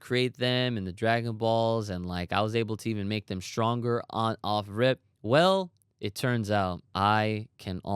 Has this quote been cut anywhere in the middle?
yes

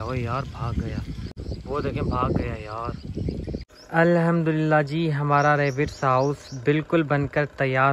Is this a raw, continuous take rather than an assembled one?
no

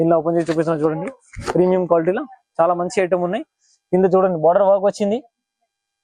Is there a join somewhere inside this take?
no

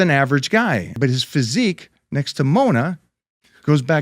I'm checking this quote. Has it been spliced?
yes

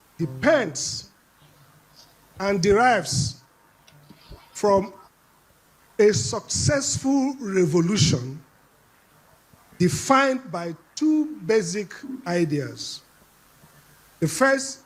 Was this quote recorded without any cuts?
yes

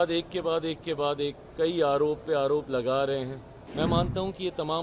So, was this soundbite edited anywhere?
yes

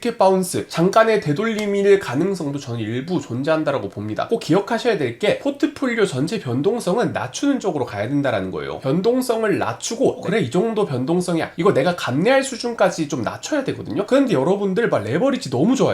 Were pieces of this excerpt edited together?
yes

